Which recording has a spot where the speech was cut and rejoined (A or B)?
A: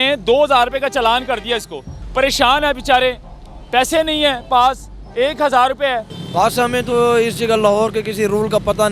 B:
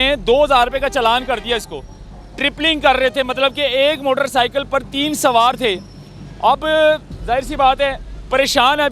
A